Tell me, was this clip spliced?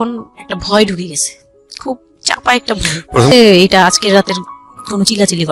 yes; 1 cut; at 3.3 s

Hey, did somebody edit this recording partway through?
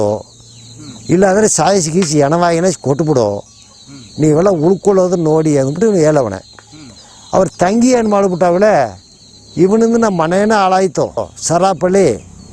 yes; 1 cut; at 11.3 s

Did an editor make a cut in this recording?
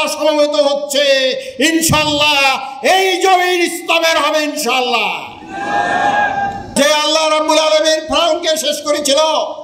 yes; 1 cut; at 6.7 s

